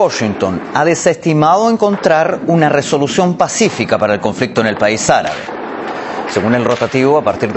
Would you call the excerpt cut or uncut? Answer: uncut